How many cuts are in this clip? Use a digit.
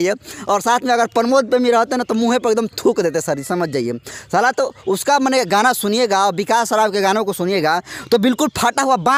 0